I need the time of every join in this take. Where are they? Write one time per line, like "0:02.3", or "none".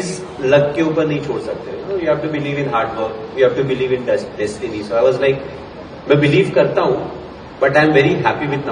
none

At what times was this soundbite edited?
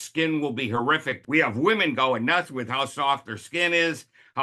0:01.2

